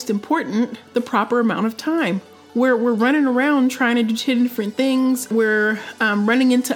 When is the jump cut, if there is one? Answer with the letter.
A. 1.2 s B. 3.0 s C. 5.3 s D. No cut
C